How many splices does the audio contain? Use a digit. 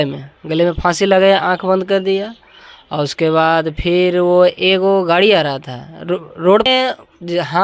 1